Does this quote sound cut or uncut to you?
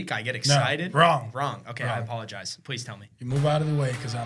uncut